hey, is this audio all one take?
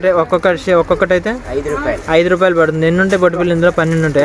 yes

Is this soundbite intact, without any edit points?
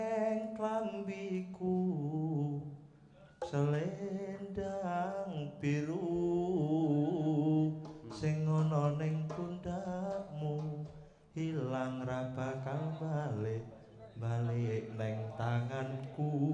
yes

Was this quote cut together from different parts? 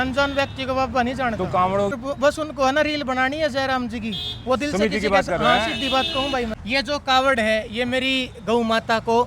yes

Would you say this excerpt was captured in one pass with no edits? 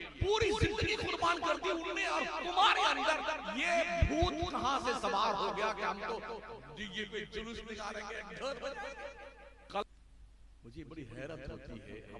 no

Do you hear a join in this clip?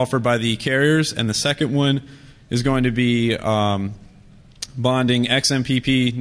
yes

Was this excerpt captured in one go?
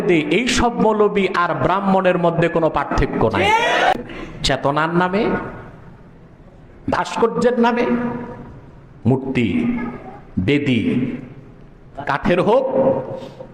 no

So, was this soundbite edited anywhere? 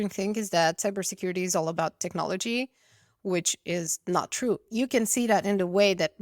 yes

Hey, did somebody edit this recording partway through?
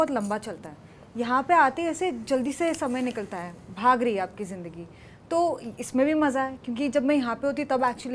no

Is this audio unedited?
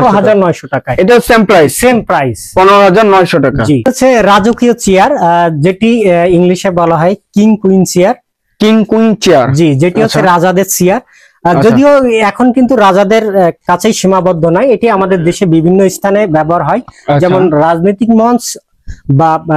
no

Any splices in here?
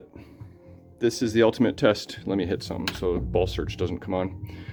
no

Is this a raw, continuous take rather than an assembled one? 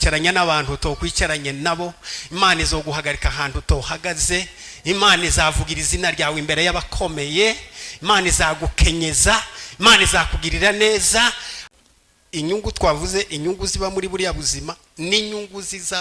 no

